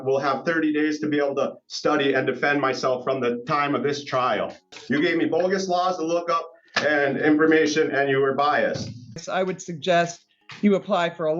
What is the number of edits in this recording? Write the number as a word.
two